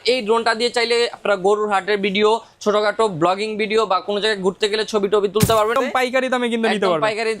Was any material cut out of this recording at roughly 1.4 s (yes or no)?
no